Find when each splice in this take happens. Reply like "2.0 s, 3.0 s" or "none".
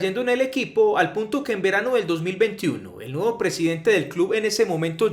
none